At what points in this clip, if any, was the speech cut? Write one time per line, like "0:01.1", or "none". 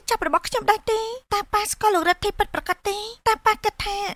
none